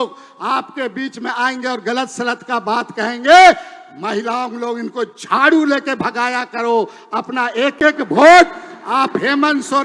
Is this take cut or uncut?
uncut